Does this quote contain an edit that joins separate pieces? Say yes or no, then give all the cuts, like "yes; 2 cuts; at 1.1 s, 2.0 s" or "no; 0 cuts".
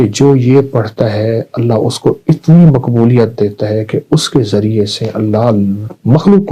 no; 0 cuts